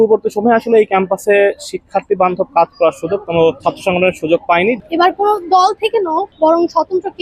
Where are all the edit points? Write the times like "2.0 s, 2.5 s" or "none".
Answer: 3.6 s, 4.8 s, 6.3 s